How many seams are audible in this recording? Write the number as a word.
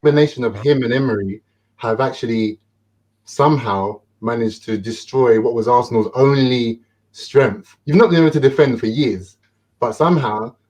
zero